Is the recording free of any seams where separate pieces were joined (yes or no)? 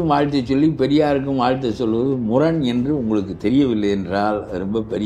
yes